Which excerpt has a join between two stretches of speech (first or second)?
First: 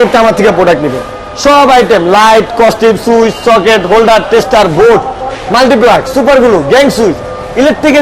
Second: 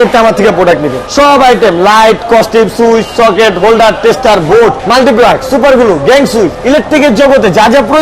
second